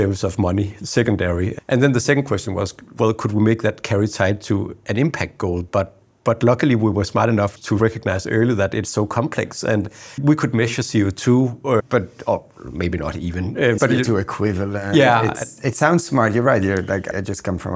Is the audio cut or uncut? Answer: uncut